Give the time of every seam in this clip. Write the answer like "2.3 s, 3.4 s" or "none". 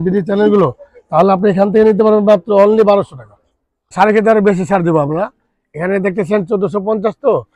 3.9 s